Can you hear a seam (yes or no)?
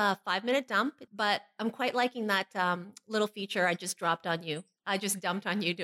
yes